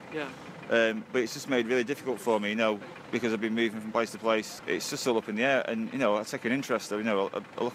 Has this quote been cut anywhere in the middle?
no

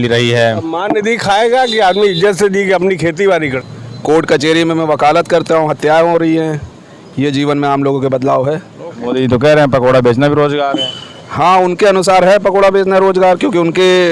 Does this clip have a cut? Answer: yes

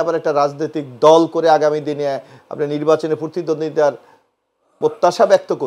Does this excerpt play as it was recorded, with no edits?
yes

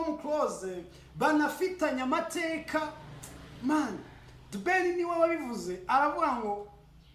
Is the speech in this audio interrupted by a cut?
no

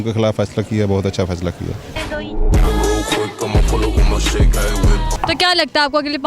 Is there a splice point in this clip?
no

